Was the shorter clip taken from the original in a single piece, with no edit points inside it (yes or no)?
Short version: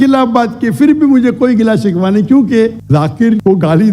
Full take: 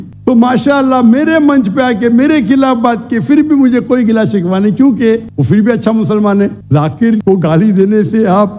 no